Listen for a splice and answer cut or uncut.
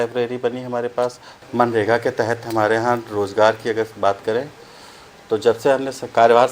cut